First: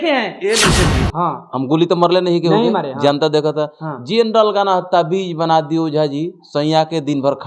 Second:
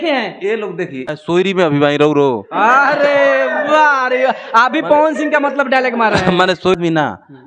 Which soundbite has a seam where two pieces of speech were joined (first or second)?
first